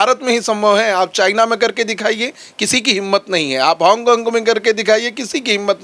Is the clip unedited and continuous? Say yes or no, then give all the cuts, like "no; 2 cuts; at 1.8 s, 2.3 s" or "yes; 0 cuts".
yes; 0 cuts